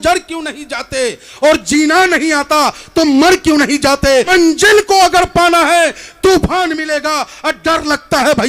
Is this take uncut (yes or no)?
no